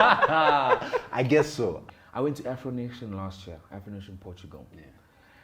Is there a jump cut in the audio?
yes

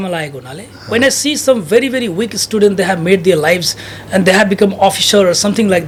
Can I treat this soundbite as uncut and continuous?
yes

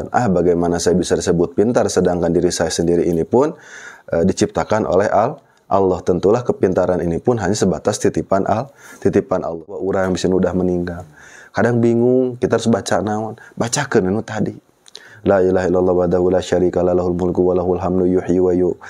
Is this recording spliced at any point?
yes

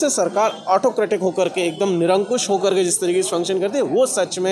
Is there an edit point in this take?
no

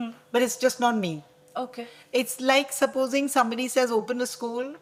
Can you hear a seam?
no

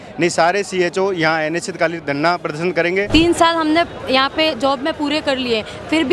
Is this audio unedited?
no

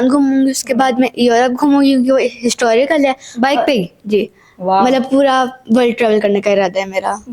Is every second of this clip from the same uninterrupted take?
yes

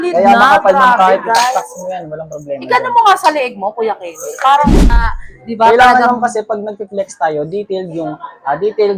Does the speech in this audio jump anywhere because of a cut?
yes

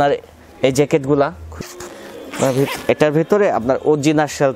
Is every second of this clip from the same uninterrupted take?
no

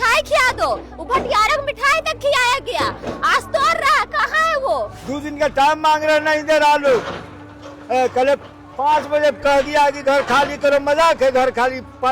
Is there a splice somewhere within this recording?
yes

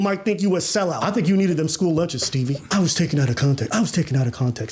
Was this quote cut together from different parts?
yes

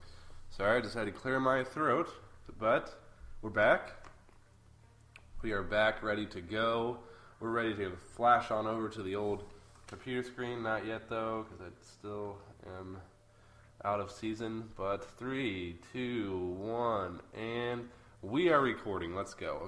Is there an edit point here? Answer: yes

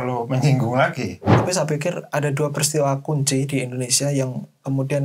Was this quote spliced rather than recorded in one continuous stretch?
yes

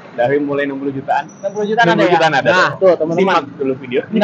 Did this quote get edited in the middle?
no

